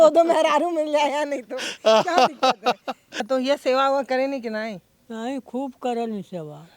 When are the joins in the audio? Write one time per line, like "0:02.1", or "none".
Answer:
0:03.2